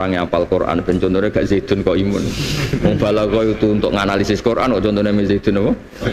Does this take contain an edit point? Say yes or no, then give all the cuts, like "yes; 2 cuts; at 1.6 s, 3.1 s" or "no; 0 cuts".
no; 0 cuts